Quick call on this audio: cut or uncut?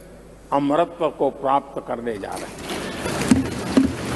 uncut